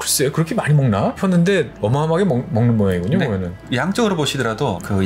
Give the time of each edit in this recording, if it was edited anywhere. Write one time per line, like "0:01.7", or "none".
0:01.2
0:01.7